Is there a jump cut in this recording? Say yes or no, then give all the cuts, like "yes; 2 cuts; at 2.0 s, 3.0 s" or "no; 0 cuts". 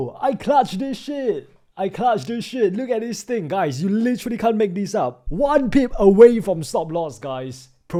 no; 0 cuts